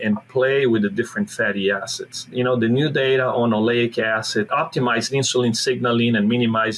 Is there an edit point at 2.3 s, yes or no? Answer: yes